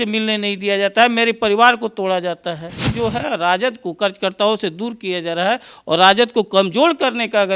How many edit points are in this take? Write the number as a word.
one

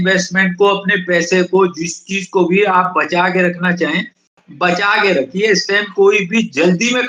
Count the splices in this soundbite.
zero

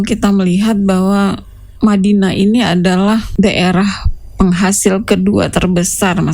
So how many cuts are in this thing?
one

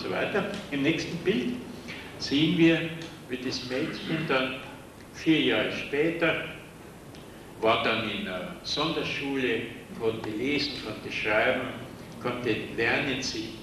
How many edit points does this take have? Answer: zero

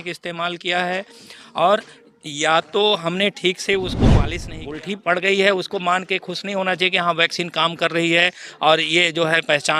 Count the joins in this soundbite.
one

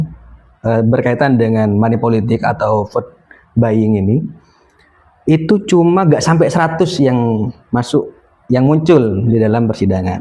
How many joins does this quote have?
zero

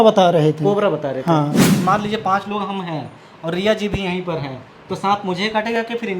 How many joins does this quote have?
one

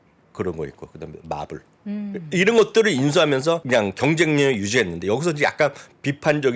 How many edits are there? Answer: one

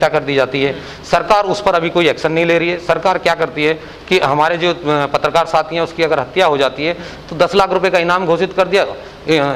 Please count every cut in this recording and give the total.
zero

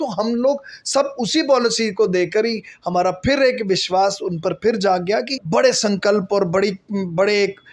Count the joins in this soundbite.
one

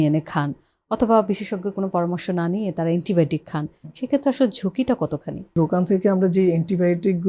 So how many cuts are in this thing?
one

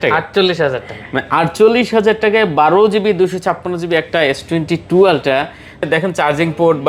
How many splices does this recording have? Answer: one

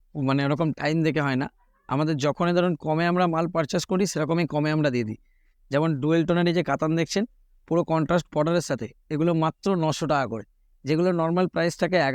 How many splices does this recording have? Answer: zero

